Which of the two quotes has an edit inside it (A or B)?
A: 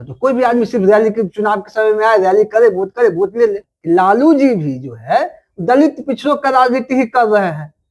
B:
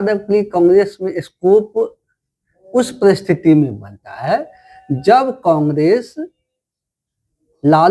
A